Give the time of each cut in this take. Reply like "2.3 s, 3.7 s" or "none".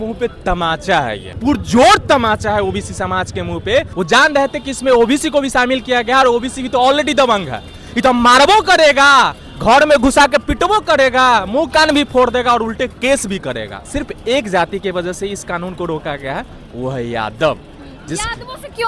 1.3 s, 3.9 s, 13.8 s